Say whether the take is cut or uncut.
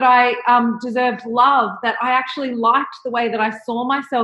uncut